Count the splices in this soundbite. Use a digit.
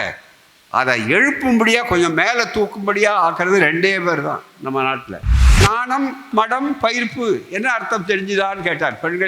1